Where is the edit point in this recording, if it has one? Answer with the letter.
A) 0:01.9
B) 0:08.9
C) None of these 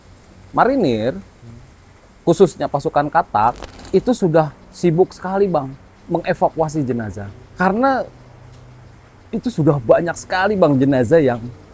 C